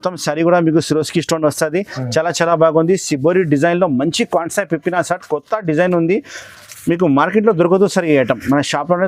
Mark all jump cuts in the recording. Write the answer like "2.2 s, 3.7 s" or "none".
none